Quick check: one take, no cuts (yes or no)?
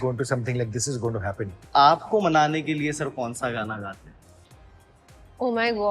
no